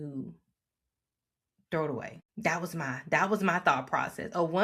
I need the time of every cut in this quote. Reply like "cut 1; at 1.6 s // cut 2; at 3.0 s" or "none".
cut 1; at 2.2 s